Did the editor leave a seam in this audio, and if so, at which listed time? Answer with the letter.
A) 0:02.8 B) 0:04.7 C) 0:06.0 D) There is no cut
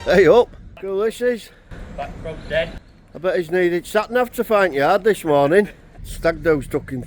C